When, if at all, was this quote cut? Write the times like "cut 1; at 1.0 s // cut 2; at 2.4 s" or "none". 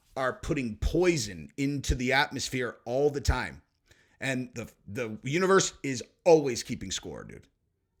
none